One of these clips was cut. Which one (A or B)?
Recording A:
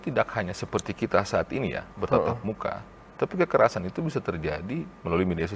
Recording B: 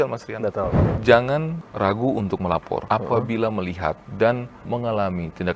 B